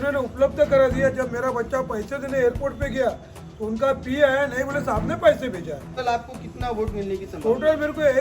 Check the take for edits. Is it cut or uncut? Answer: cut